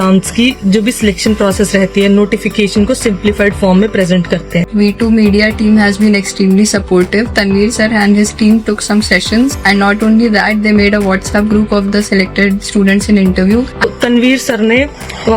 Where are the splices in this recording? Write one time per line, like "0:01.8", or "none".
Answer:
0:04.7
0:13.8